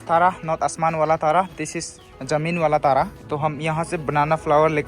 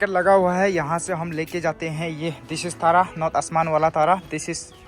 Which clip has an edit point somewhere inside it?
first; 1 cut; at 3.2 s

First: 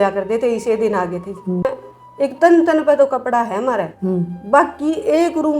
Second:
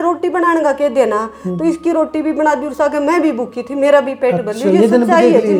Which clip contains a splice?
first; 1 cut; at 1.6 s

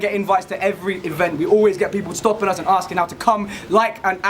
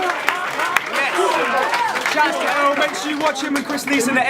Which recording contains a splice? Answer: second; 1 cut; at 1.1 s

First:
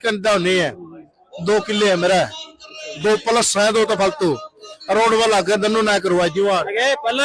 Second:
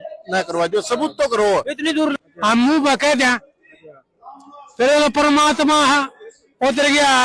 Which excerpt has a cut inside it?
second; 1 cut; at 2.2 s

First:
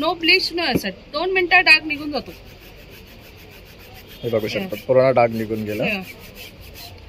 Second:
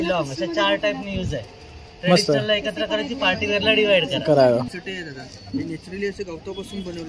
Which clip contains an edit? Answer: second; 1 cut; at 4.7 s

